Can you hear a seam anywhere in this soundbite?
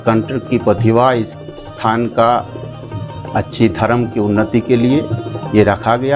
no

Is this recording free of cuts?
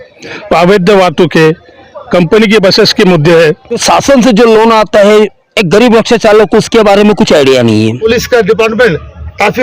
no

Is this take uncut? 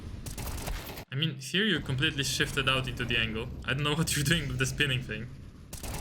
yes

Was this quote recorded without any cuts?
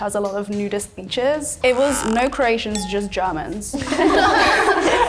yes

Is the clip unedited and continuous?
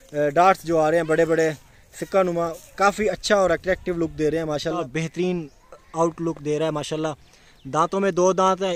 no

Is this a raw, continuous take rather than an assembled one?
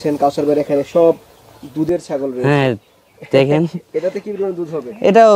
yes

